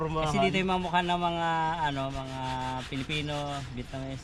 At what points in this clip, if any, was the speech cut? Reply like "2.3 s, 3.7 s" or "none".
none